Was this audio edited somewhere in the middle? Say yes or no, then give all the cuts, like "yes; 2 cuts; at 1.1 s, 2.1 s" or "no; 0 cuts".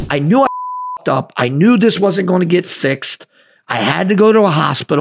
no; 0 cuts